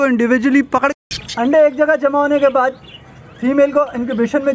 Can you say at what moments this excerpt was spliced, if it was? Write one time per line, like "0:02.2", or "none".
0:01.0